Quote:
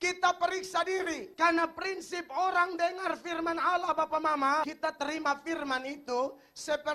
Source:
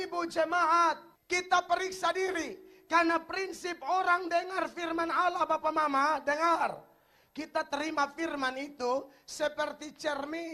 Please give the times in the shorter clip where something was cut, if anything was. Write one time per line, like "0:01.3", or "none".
0:01.3
0:04.7